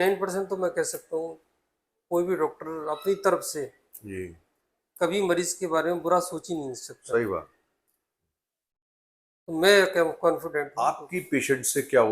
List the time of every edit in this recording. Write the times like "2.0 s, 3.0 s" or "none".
10.7 s